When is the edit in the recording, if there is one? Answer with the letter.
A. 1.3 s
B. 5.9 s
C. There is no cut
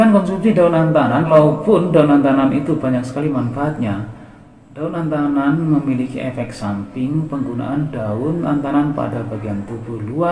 A